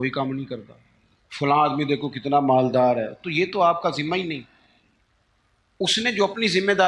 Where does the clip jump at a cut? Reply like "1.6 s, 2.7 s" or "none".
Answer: none